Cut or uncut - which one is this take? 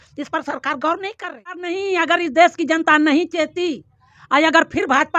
cut